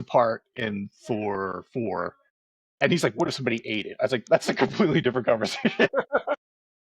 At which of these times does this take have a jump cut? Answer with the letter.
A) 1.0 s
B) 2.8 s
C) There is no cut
B